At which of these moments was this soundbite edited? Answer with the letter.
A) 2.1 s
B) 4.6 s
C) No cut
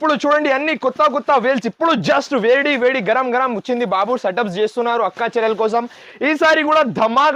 C